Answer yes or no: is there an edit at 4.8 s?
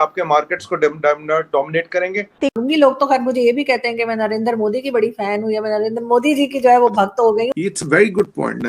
no